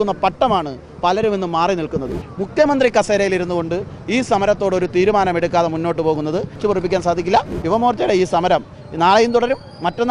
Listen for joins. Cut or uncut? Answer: cut